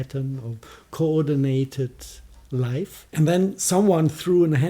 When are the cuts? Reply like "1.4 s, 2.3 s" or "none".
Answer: 3.0 s